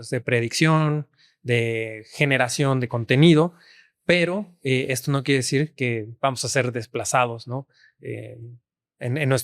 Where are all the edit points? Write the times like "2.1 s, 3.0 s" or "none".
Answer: none